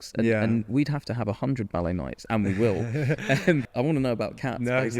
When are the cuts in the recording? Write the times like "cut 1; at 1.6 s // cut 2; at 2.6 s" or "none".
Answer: cut 1; at 3.7 s